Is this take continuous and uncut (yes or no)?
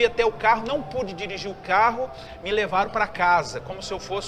yes